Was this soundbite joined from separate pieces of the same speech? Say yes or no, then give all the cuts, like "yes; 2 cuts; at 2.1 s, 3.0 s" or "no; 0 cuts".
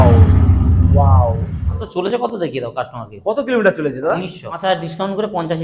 yes; 2 cuts; at 1.8 s, 4.5 s